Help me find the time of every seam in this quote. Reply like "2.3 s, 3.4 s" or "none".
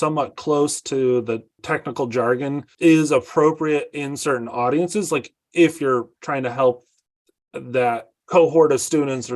1.6 s, 2.7 s, 8.1 s